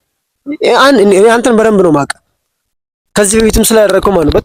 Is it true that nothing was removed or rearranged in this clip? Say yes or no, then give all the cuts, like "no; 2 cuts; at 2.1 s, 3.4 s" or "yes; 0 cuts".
yes; 0 cuts